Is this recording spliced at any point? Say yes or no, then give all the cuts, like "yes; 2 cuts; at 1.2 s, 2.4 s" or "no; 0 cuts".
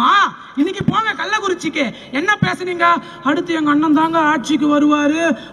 no; 0 cuts